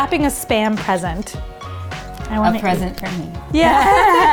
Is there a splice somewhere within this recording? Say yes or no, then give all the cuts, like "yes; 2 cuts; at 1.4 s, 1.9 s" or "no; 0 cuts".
no; 0 cuts